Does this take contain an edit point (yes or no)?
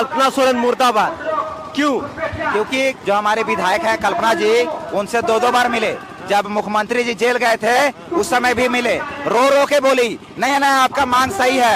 yes